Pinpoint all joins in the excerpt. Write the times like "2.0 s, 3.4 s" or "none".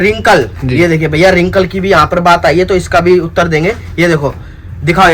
none